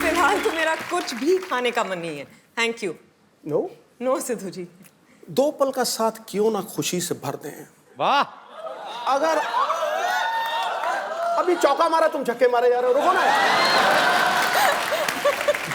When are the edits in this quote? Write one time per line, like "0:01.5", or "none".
none